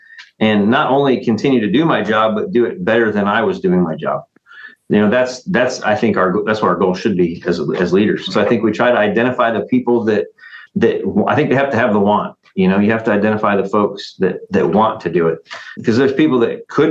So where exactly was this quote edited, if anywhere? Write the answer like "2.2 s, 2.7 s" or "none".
none